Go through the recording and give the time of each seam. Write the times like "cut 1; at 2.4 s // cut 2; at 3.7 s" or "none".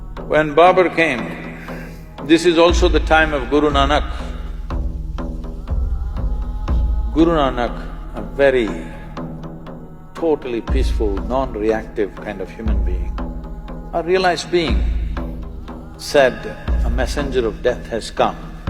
none